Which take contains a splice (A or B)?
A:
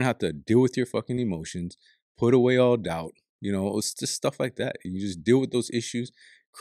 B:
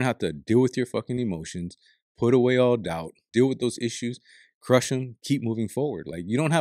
B